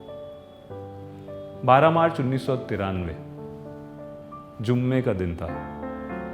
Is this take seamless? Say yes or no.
no